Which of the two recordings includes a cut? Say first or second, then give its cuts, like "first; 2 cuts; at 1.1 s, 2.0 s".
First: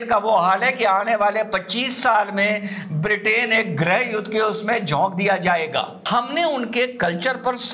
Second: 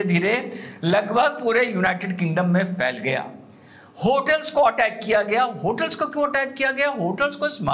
first; 1 cut; at 6.0 s